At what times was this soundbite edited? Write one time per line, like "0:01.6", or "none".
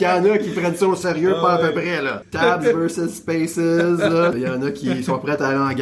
0:02.2
0:04.4